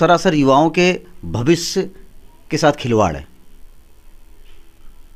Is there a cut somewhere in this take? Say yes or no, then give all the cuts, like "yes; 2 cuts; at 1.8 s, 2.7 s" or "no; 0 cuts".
no; 0 cuts